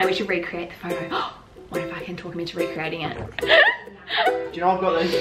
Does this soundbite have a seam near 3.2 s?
yes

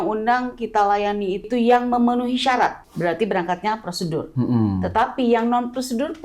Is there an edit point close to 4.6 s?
no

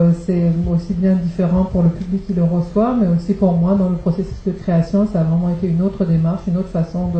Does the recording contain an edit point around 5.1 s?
yes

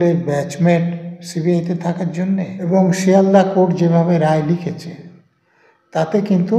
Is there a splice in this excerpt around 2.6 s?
yes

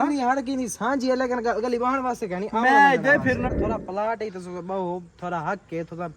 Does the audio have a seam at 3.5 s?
yes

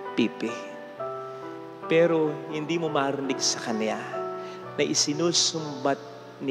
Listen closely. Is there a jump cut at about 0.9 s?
no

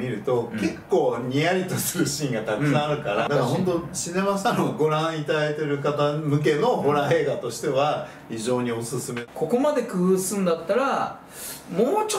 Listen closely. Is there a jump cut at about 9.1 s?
yes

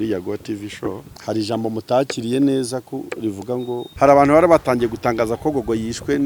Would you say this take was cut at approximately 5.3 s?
no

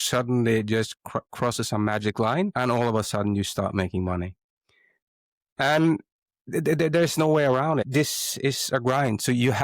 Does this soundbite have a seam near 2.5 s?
yes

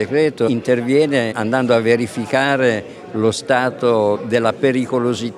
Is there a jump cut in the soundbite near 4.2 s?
yes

